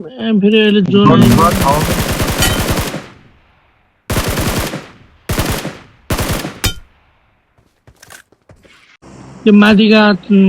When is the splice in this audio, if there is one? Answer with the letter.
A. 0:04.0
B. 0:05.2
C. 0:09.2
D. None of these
C